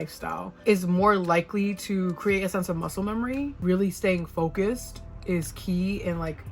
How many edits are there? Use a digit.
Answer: 1